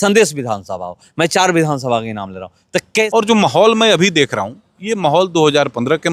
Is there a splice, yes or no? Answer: yes